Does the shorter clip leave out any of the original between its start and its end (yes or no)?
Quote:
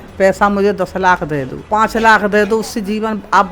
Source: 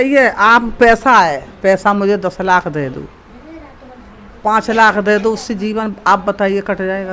yes